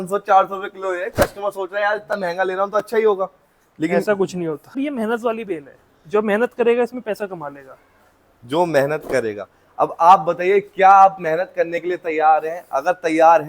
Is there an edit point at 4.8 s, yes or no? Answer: yes